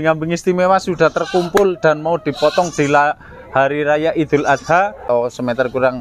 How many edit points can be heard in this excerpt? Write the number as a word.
one